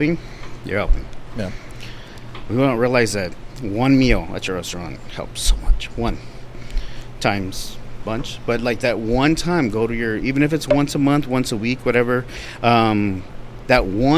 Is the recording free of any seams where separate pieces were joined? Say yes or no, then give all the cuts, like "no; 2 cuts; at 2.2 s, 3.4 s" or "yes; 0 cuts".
yes; 0 cuts